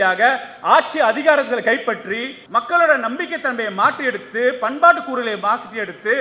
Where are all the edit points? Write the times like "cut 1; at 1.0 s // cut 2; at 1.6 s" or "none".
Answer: cut 1; at 2.3 s